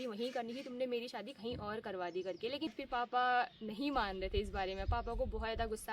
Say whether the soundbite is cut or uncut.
cut